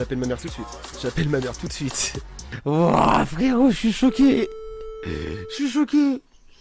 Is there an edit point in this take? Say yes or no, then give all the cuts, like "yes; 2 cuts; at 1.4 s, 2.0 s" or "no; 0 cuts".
yes; 1 cut; at 2.5 s